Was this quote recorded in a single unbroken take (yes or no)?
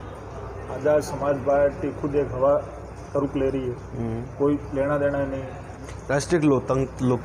no